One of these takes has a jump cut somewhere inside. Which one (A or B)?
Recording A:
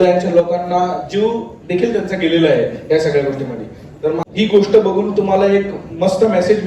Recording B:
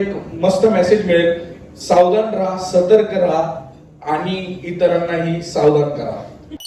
A